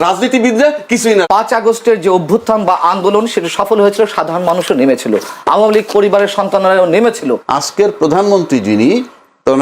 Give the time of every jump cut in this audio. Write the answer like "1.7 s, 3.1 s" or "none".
1.2 s, 7.4 s